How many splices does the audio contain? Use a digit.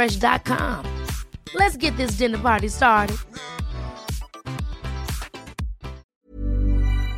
1